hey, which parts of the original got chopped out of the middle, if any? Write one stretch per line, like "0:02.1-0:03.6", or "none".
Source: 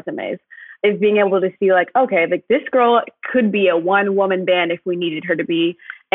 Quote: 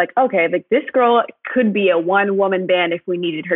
none

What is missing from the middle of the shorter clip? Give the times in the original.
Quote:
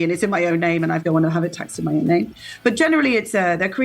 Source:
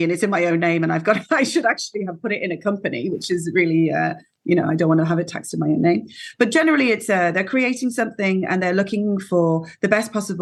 0:01.0-0:04.8

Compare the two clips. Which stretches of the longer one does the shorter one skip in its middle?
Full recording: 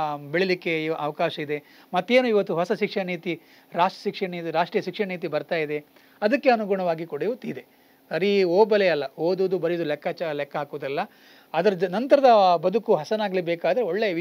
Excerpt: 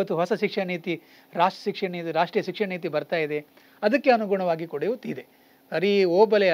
none

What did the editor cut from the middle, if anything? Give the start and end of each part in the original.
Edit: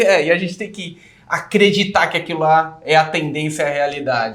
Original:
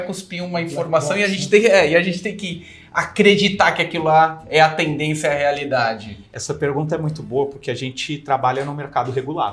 none

